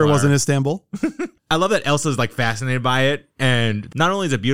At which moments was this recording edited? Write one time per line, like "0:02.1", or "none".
0:01.3